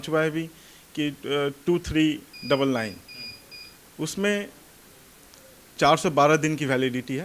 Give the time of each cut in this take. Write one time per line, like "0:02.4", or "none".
none